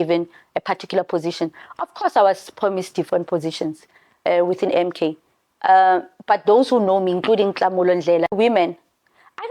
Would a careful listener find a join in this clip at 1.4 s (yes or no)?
no